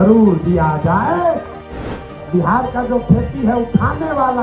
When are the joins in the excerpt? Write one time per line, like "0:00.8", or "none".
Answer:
0:02.1